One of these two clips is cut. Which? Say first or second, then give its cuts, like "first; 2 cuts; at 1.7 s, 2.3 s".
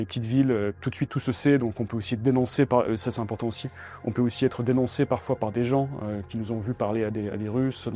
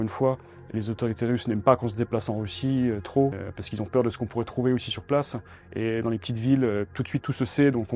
second; 1 cut; at 3.4 s